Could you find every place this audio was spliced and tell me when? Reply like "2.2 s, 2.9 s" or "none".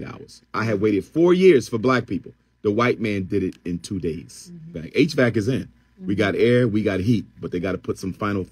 4.8 s